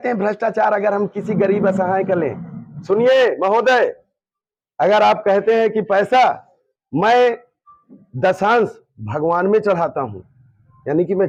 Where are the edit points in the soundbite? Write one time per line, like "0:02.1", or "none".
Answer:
none